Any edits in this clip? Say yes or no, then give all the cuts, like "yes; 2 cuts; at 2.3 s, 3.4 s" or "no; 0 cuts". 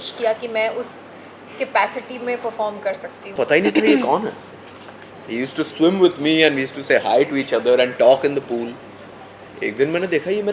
yes; 1 cut; at 3.2 s